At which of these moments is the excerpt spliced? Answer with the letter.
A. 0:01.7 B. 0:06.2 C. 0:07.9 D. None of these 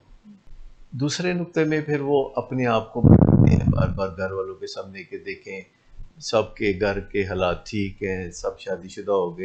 D